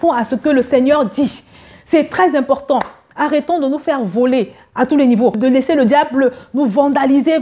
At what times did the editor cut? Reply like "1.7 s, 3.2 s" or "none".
5.4 s